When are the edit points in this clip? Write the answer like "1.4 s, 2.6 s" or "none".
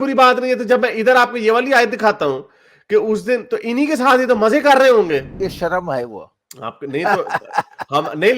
5.4 s